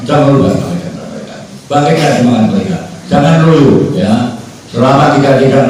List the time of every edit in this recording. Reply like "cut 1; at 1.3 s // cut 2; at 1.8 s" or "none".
none